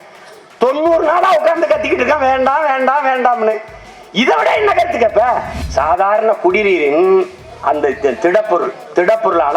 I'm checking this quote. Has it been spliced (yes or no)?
yes